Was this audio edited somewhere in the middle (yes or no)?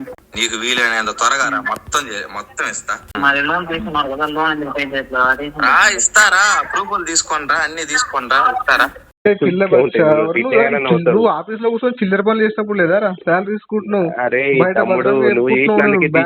yes